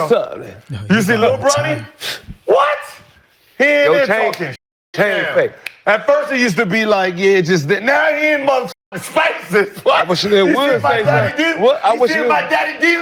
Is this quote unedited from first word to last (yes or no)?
yes